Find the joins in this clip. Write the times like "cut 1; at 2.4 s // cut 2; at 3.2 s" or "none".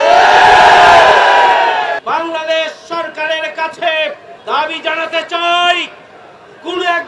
cut 1; at 2.0 s // cut 2; at 4.3 s